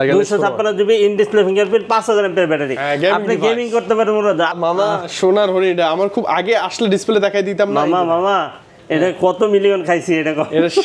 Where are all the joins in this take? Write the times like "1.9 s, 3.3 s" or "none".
4.6 s